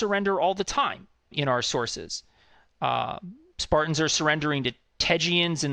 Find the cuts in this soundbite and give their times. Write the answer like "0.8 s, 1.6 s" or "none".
1.3 s